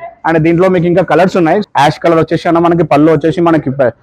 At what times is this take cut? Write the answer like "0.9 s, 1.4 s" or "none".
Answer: 1.6 s